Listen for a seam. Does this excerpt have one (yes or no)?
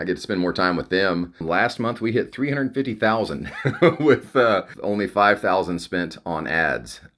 yes